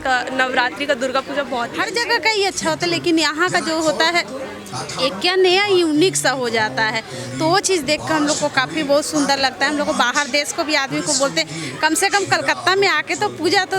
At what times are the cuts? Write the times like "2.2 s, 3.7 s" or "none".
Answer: 1.8 s